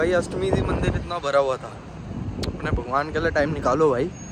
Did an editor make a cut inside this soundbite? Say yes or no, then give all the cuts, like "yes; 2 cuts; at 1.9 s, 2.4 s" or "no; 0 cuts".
no; 0 cuts